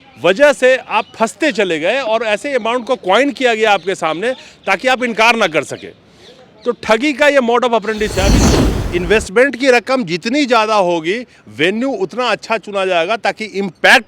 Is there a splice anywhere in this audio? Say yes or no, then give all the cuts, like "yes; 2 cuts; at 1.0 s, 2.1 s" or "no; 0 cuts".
yes; 1 cut; at 8.4 s